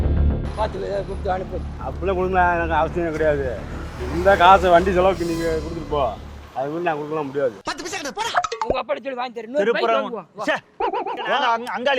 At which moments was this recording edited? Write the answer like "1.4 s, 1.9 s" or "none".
8.8 s

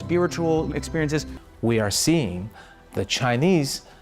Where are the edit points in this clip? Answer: 1.4 s

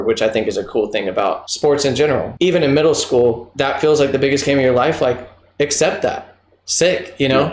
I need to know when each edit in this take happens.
1.5 s, 2.3 s, 3.5 s

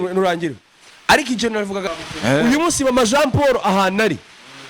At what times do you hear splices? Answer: 1.8 s

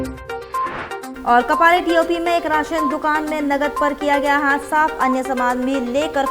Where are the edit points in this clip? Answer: 1.1 s

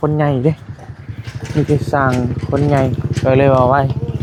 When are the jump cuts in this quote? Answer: none

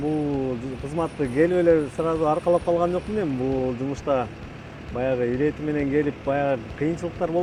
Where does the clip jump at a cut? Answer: none

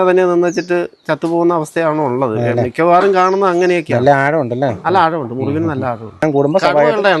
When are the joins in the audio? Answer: 6.2 s

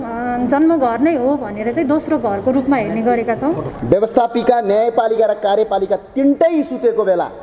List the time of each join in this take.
3.7 s

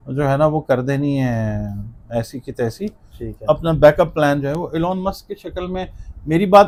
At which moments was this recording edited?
none

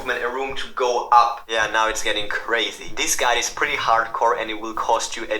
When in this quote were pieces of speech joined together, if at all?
1.4 s, 2.9 s

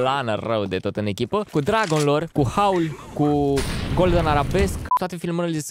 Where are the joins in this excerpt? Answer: 1.5 s, 2.3 s, 4.9 s

